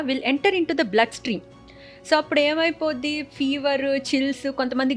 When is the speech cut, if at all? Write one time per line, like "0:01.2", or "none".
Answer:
none